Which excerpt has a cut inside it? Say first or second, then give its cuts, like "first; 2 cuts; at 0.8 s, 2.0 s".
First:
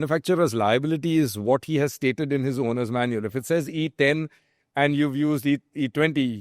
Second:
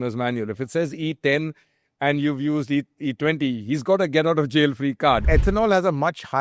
second; 1 cut; at 5.2 s